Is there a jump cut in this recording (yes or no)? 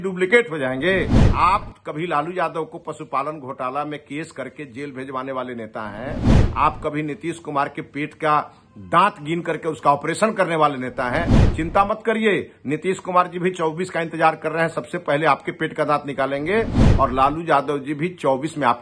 yes